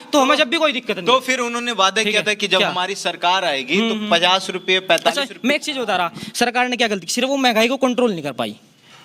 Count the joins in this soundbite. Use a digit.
0